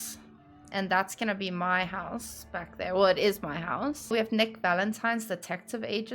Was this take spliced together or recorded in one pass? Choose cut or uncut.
cut